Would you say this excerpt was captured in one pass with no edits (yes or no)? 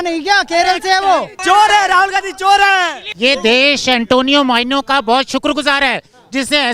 no